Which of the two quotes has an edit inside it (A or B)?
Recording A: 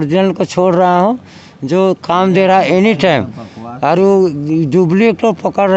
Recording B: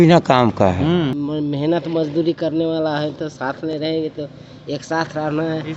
B